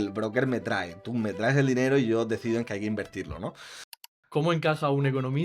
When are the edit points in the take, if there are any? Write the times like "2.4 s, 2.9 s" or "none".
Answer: 4.1 s